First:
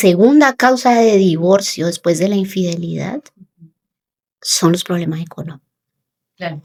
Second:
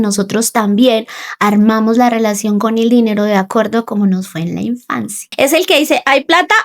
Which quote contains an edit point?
second; 1 cut; at 5.2 s

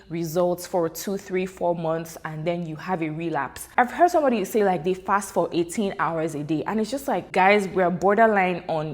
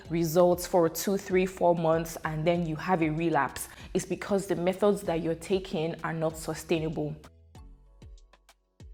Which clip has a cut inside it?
first; 2 cuts; at 3.7 s, 7.3 s

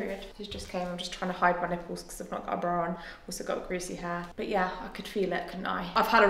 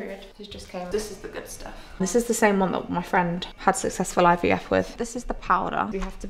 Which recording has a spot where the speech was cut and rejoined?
second; 3 cuts; at 0.9 s, 2.0 s, 4.9 s

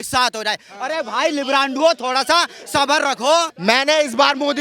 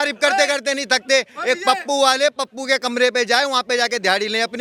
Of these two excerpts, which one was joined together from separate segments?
first; 1 cut; at 3.5 s

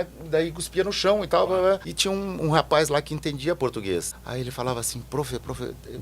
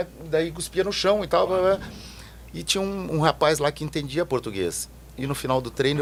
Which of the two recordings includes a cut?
first; 2 cuts; at 1.9 s, 4.2 s

